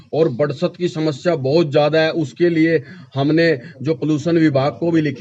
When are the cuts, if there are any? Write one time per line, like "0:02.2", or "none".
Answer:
none